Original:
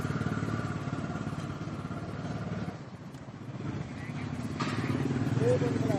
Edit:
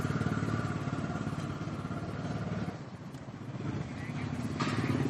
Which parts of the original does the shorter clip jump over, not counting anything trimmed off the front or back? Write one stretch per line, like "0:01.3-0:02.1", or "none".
none